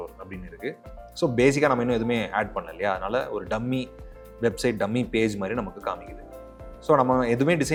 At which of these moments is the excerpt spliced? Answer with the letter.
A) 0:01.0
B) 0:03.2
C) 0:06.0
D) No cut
D